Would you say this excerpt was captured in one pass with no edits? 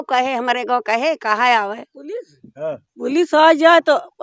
yes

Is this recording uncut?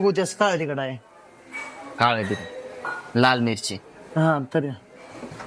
yes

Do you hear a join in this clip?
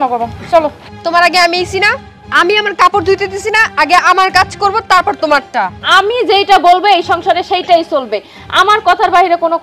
yes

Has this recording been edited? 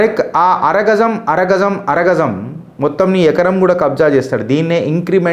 no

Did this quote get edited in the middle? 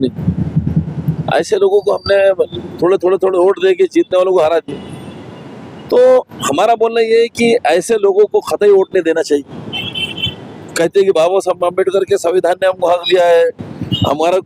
no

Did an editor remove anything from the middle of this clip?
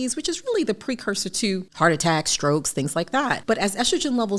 yes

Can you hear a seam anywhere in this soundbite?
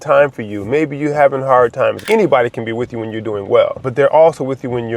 yes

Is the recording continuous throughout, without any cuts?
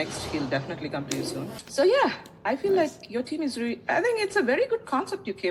no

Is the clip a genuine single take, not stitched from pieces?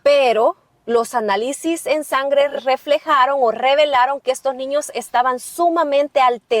no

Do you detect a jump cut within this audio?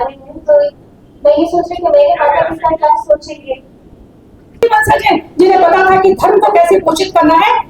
yes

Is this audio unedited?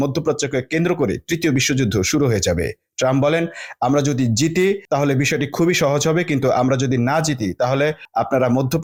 yes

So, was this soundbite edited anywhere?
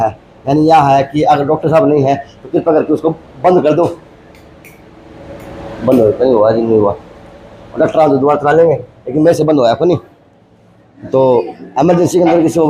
no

